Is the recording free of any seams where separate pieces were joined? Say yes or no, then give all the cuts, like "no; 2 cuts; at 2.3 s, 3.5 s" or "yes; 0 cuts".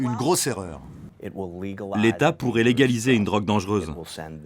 no; 1 cut; at 1.0 s